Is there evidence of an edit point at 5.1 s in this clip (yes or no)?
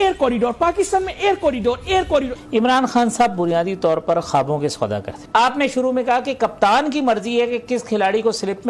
yes